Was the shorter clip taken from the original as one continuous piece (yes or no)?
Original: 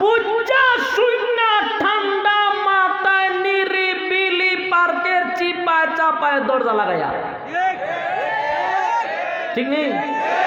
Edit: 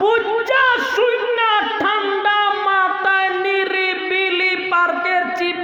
yes